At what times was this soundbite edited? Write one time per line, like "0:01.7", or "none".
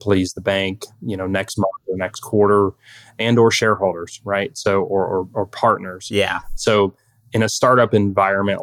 0:06.4